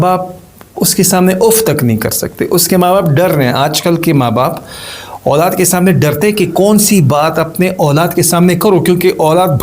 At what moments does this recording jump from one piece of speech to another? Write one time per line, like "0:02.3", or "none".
none